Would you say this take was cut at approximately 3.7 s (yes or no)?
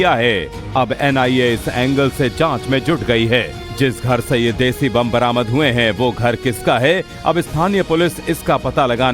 no